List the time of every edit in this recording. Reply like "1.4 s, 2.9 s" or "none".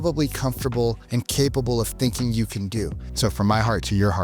1.0 s, 3.0 s

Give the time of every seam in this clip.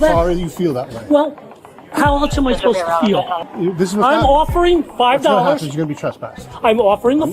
3.5 s

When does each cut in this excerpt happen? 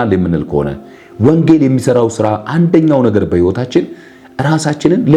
none

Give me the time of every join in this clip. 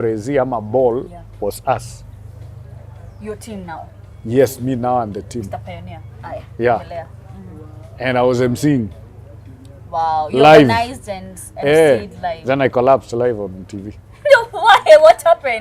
none

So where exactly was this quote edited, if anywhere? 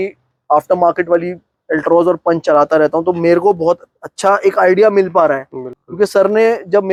none

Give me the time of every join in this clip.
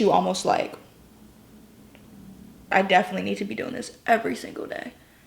2.7 s

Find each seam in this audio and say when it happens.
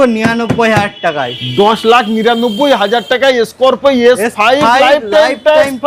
none

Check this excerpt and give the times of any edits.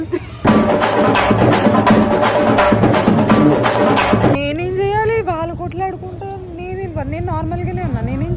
4.4 s

